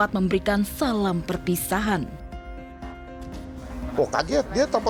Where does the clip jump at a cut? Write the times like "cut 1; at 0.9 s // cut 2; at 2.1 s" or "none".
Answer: none